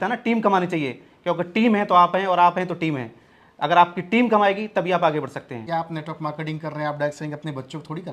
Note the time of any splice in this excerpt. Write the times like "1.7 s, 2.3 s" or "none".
5.6 s